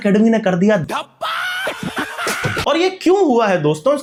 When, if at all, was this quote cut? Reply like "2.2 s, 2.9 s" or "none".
none